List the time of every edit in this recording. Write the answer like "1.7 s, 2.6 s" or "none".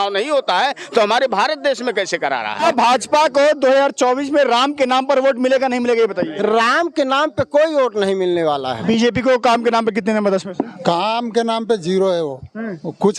2.5 s, 8.7 s